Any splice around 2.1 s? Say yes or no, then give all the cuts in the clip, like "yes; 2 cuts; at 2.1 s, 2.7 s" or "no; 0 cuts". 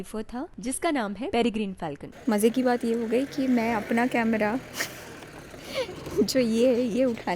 yes; 1 cut; at 2.1 s